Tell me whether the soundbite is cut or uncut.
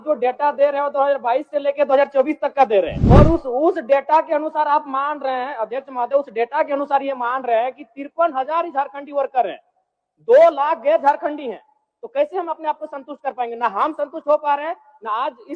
cut